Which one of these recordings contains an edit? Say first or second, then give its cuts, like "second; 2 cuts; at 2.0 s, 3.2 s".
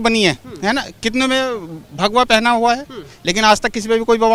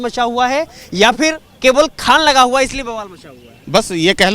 second; 1 cut; at 1.5 s